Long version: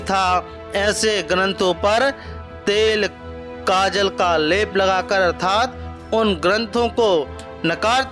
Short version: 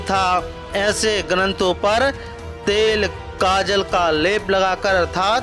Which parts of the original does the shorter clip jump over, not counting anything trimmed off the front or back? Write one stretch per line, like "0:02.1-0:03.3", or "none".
0:03.2-0:03.5